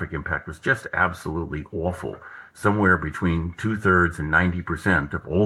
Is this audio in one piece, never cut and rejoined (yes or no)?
yes